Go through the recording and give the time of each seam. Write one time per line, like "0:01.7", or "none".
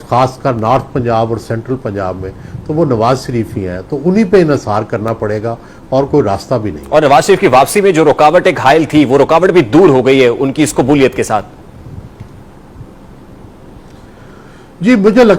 none